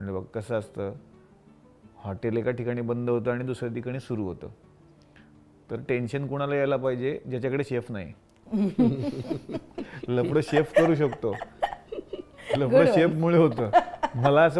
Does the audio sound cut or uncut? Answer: uncut